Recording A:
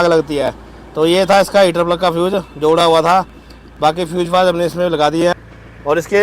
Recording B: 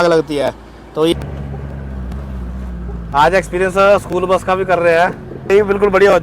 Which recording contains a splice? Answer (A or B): B